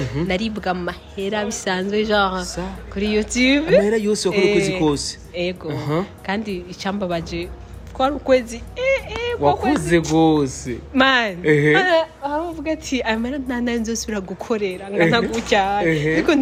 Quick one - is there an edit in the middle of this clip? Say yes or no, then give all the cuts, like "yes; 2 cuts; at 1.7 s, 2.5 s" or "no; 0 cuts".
no; 0 cuts